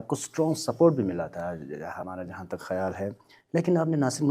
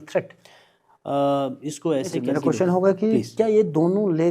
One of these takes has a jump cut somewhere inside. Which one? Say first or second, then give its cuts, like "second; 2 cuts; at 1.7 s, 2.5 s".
second; 1 cut; at 2.2 s